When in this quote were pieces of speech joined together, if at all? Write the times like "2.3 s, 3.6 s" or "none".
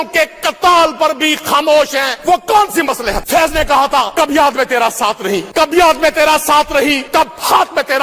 2.1 s, 3.2 s, 4.1 s, 5.5 s, 7.0 s